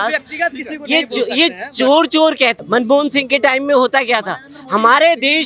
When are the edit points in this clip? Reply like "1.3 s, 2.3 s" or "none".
2.6 s